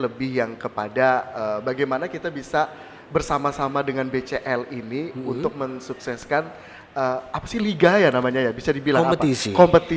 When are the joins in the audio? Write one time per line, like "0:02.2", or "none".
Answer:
none

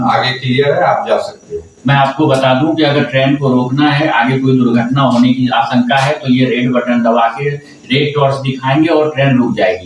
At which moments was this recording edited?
none

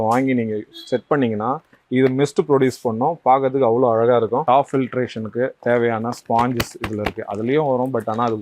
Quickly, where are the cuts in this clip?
0:04.4

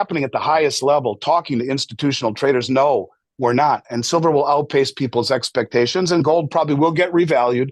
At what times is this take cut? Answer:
none

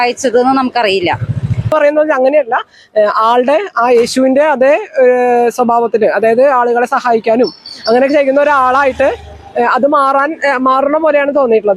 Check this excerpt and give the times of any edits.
0:01.7

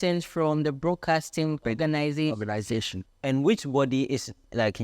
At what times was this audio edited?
0:01.6
0:03.0

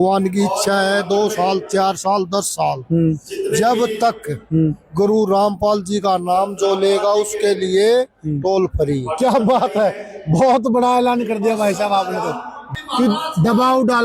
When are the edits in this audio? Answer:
0:12.6

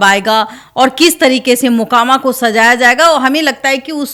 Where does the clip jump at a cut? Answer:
none

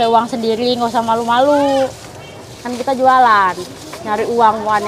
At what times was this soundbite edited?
none

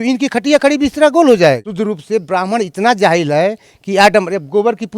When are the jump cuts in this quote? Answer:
0:01.7

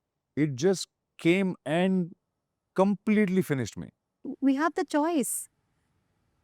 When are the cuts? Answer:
0:04.3

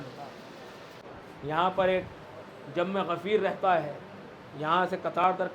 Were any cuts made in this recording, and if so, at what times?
0:01.0

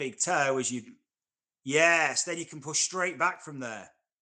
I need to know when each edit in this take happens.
none

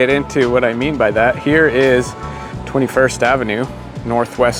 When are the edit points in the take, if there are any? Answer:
none

